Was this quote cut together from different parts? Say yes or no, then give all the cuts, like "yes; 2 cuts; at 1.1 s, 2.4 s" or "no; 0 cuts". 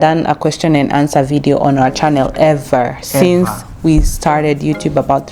no; 0 cuts